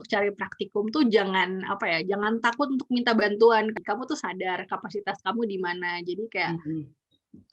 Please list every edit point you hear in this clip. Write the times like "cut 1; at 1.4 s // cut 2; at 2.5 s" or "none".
cut 1; at 3.8 s